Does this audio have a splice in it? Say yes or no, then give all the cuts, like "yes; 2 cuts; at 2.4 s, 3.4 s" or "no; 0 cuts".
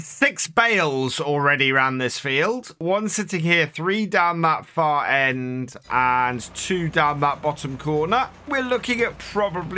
yes; 2 cuts; at 2.8 s, 8.5 s